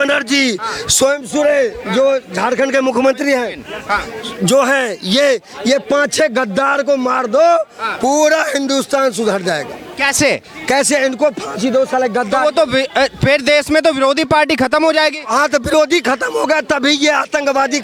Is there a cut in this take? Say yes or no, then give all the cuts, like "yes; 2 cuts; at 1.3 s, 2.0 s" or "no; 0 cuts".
no; 0 cuts